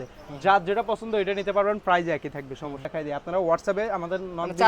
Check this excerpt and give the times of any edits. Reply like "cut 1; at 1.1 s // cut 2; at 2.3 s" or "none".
cut 1; at 2.9 s